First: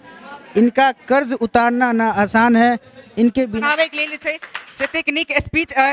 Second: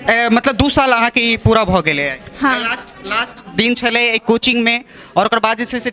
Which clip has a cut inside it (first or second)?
first